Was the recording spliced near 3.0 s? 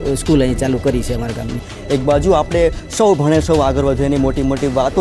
no; 1 cut; at 1.7 s

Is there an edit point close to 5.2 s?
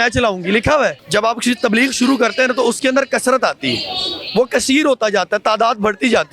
no; 1 cut; at 1.0 s

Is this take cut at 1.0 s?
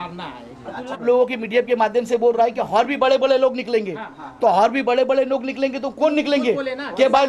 yes; 1 cut; at 1.0 s

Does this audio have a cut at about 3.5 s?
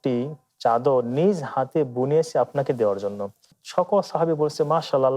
yes; 1 cut; at 3.5 s

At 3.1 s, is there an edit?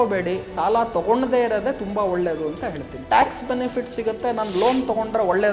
yes; 1 cut; at 3.1 s

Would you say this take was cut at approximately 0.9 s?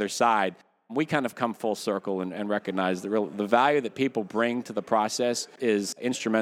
yes; 2 cuts; at 0.9 s, 5.5 s

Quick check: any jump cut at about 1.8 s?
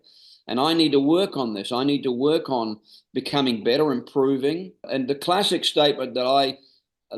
no; 1 cut; at 4.8 s

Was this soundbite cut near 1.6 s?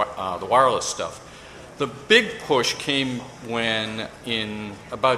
no; 1 cut; at 3.6 s

